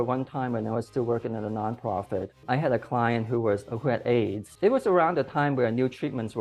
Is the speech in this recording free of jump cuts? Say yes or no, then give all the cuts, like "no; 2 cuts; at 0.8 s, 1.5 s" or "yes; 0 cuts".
no; 2 cuts; at 2.4 s, 4.5 s